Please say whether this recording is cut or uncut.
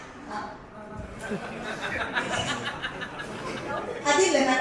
uncut